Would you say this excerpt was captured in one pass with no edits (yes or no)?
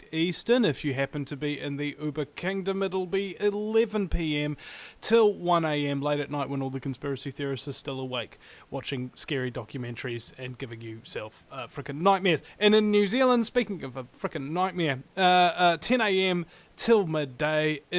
no